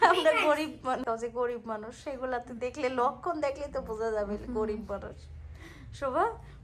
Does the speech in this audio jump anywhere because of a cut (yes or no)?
yes